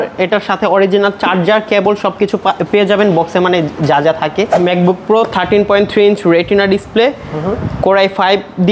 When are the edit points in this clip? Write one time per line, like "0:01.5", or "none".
0:04.5